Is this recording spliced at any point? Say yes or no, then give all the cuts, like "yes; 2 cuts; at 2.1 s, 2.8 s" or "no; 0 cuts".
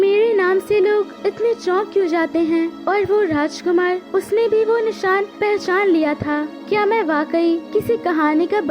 yes; 6 cuts; at 1.1 s, 2.8 s, 4.0 s, 5.3 s, 6.5 s, 7.6 s